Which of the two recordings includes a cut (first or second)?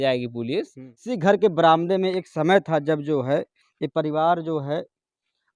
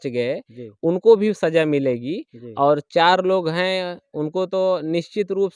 first